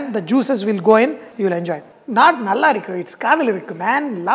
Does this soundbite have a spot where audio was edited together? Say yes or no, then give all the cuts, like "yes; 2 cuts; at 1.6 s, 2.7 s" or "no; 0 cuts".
yes; 1 cut; at 1.5 s